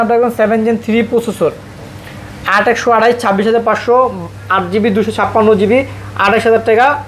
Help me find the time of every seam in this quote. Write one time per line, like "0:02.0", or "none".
none